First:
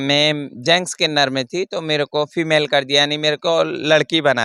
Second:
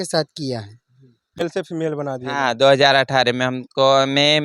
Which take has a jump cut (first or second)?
second